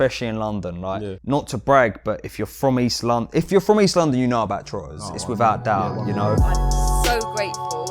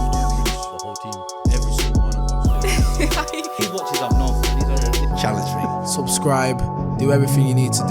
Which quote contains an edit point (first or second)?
first